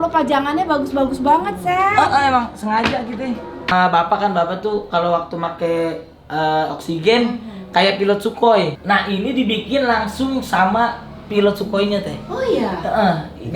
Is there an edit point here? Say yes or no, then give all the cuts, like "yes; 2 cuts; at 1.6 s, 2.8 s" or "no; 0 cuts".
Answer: yes; 2 cuts; at 3.7 s, 8.8 s